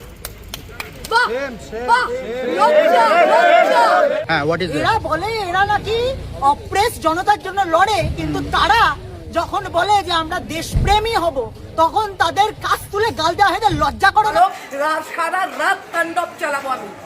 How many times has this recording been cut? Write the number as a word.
two